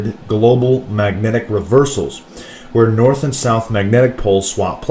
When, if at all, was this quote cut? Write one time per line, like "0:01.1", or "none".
none